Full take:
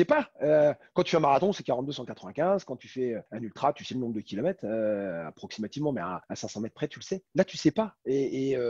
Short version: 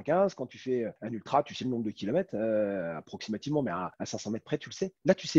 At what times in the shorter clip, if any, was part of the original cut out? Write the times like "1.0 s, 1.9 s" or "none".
none